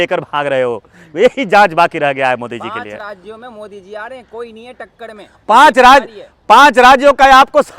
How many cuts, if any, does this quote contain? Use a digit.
0